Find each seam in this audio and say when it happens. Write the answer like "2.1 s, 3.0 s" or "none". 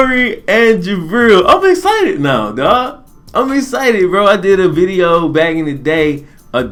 none